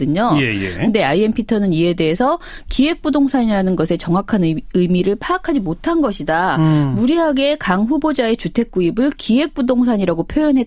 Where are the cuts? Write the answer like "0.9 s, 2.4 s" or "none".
none